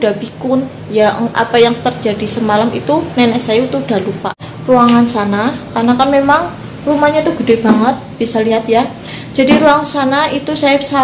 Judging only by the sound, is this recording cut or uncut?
cut